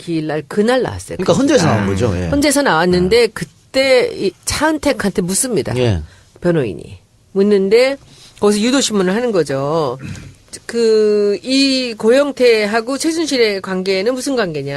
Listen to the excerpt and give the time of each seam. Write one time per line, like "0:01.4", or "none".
0:07.0